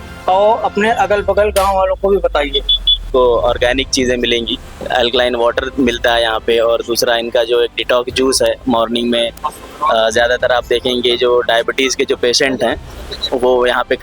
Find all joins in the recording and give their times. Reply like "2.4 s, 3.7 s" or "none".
3.0 s, 4.8 s

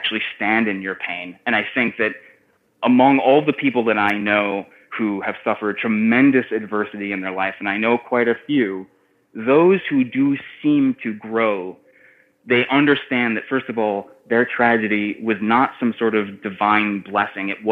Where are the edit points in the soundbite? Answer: none

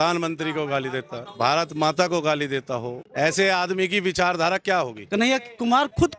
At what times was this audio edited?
1.2 s, 5.1 s

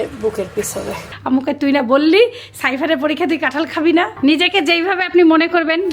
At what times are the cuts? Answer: 1.0 s, 4.1 s

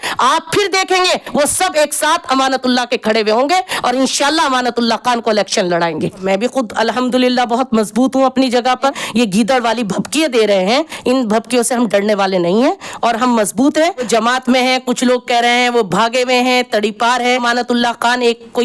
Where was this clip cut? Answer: 6.2 s, 9.0 s, 14.0 s, 17.4 s

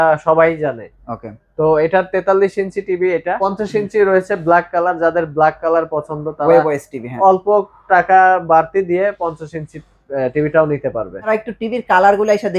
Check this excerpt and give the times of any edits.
3.4 s, 11.2 s

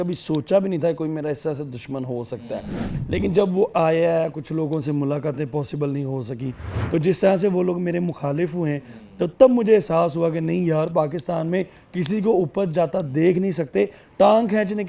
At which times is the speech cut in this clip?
none

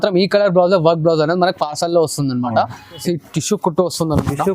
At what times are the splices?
3.0 s

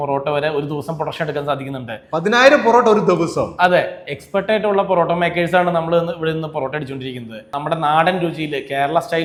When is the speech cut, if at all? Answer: none

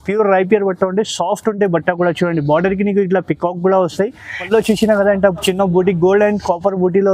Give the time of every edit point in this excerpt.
4.4 s

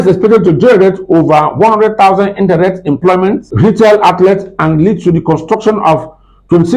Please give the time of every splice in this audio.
3.5 s

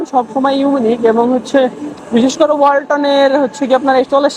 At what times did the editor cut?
none

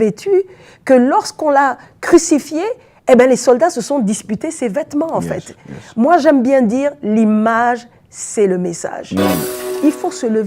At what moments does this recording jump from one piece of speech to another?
9.5 s

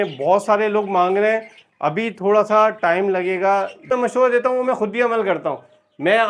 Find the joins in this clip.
3.9 s

